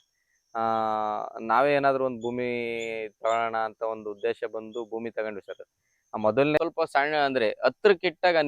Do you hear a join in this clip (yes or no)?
yes